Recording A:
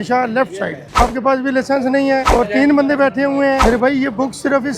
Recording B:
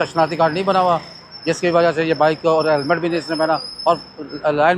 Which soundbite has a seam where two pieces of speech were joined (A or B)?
A